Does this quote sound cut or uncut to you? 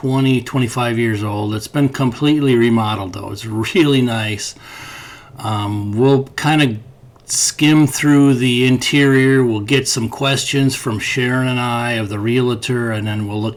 uncut